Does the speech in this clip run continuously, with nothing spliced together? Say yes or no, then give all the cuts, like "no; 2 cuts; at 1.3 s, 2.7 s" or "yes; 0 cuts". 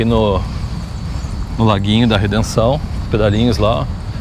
yes; 0 cuts